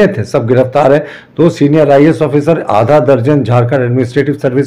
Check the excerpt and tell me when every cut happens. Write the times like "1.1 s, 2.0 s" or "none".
none